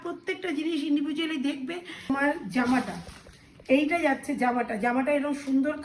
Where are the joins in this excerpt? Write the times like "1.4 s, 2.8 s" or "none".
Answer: 2.1 s

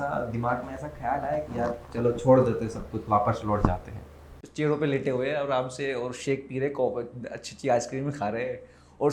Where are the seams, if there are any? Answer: 4.3 s

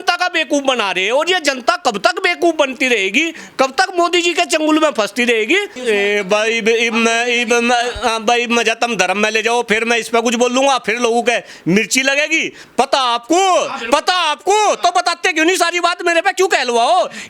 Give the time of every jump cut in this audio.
5.7 s, 12.6 s

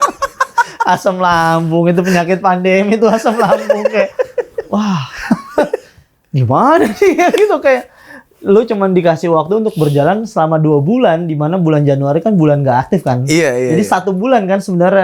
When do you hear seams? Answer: none

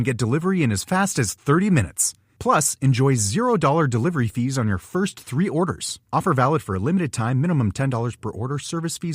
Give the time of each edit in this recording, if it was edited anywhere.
none

